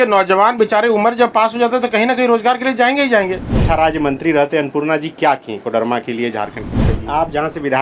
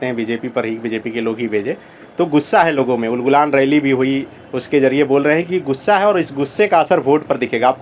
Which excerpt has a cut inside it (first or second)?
first